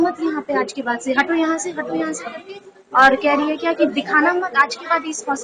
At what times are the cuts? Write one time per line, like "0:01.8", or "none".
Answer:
none